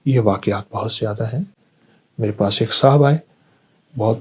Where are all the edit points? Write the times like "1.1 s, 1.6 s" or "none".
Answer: none